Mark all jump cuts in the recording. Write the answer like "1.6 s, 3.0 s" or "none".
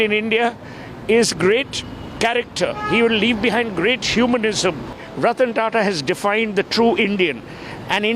5.0 s